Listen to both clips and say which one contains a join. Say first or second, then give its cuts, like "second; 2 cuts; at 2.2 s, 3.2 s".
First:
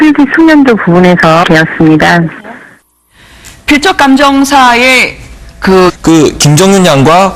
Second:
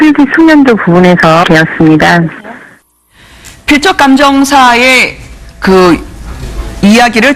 second; 1 cut; at 5.9 s